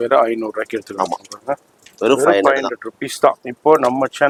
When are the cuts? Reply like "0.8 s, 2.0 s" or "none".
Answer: none

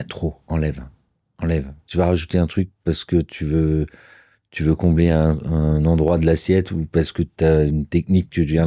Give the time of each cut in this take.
1.8 s

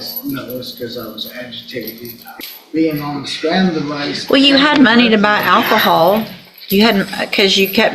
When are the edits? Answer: 2.2 s

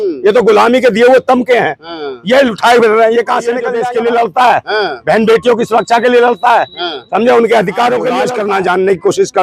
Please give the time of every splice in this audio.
3.8 s, 8.2 s

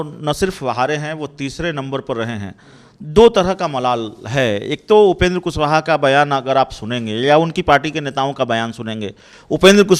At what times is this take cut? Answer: none

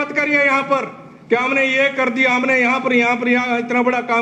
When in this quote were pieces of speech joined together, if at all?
none

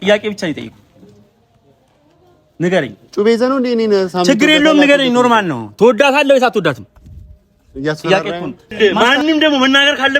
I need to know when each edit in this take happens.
8.7 s

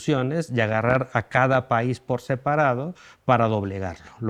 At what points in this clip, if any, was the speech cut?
none

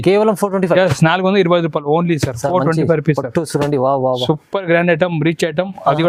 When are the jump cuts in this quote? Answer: none

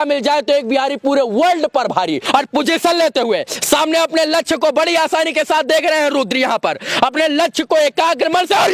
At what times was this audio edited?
2.2 s

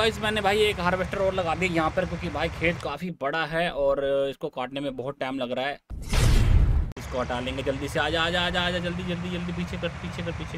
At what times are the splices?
5.9 s, 6.9 s

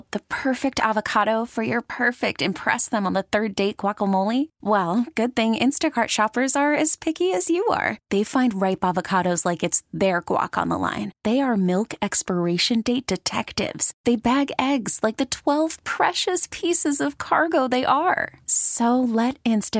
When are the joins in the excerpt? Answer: none

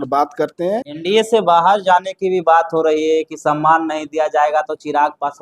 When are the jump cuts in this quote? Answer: 0.9 s

